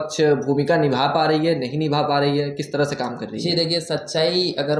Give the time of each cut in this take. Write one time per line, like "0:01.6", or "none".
none